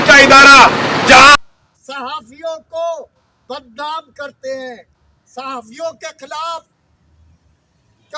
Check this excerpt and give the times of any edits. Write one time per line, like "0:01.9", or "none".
0:01.4

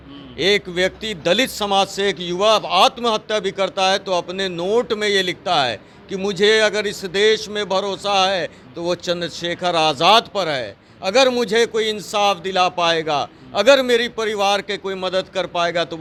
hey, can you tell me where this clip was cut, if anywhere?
none

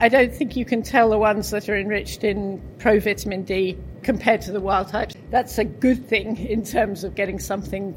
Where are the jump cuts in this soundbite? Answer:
0:03.9
0:05.1

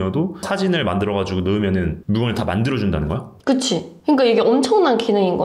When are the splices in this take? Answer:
none

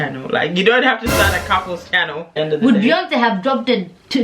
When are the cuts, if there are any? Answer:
0:02.3

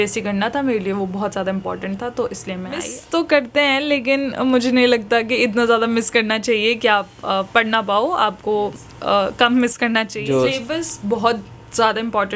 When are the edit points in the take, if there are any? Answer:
0:02.9
0:10.2

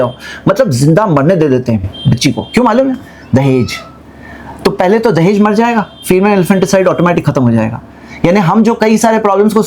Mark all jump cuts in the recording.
none

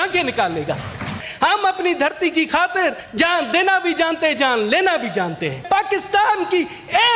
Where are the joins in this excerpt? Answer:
0:01.2
0:03.0
0:05.6

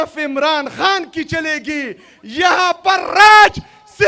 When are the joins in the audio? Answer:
none

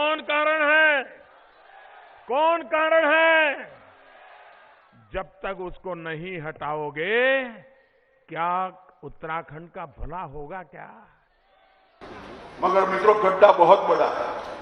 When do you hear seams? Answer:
0:12.0

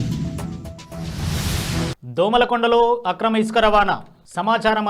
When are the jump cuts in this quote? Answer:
0:02.0

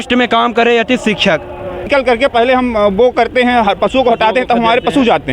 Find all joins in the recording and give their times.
0:01.9

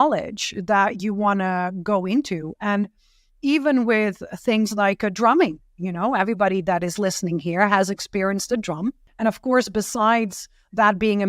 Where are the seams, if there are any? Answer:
0:09.1

